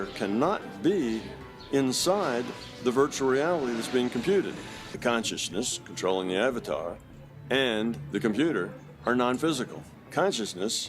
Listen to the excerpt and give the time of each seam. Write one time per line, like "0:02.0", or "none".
0:04.9
0:10.0